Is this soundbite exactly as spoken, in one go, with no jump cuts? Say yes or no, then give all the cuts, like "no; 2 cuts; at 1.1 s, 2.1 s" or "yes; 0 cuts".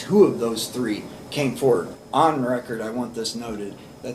no; 1 cut; at 1.9 s